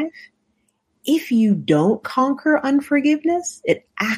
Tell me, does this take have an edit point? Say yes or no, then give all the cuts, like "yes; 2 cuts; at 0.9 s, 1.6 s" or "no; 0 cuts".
no; 0 cuts